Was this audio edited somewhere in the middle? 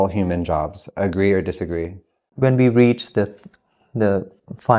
no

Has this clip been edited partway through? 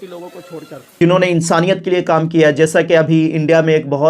yes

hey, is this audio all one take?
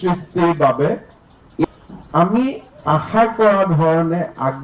no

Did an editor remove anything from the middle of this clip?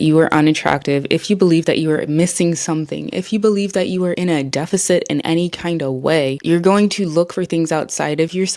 no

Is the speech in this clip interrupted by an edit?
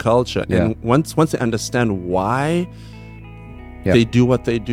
no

